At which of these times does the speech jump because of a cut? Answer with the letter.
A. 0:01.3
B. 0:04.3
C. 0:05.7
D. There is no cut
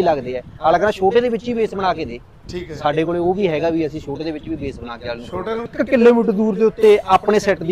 C